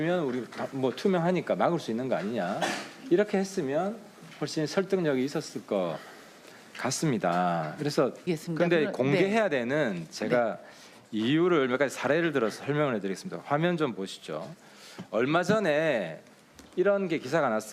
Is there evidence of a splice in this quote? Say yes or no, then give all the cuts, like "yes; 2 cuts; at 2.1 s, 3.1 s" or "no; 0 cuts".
no; 0 cuts